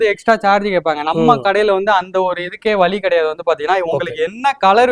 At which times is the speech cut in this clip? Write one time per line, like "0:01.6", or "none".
none